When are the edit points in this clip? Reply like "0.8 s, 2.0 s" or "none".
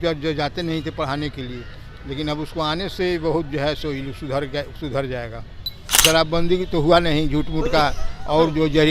6.0 s